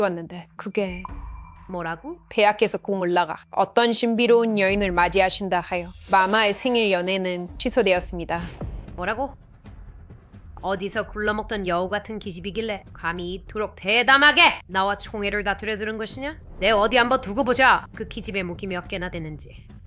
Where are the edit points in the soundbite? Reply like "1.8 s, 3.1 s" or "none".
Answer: none